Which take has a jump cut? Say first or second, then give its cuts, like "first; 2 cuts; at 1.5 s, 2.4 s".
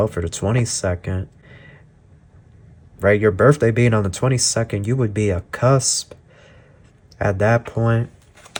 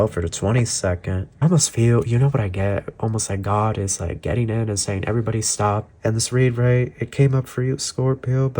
second; 2 cuts; at 1.3 s, 5.9 s